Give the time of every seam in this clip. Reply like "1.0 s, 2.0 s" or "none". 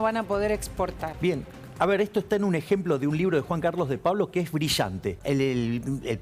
1.1 s, 5.2 s